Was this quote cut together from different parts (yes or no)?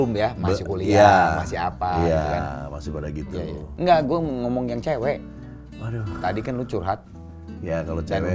no